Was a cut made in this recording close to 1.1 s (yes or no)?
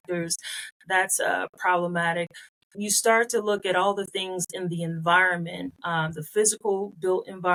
no